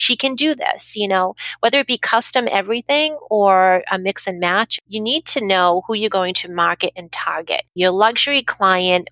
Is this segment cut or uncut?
cut